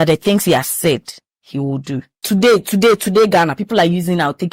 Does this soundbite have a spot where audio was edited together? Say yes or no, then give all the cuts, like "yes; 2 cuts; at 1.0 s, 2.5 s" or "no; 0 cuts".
yes; 1 cut; at 2.1 s